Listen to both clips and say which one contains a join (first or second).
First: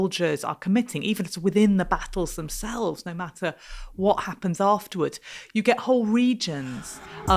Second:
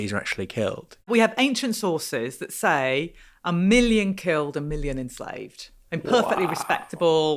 second